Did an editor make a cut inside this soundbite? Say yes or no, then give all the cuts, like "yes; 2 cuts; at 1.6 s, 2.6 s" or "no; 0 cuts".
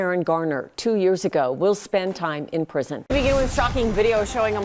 yes; 1 cut; at 3.0 s